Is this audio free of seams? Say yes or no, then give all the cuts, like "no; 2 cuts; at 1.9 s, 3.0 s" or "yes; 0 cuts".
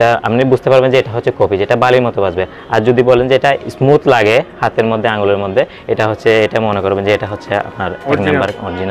yes; 0 cuts